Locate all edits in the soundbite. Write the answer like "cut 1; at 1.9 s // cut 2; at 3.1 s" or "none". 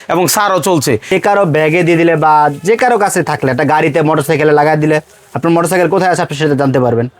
cut 1; at 1.1 s